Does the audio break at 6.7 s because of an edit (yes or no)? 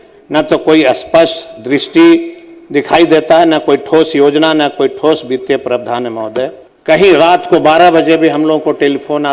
yes